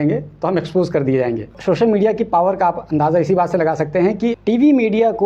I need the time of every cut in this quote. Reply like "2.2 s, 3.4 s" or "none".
1.6 s, 4.4 s